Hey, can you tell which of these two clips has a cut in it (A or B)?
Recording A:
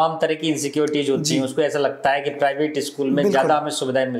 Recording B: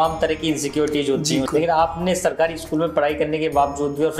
B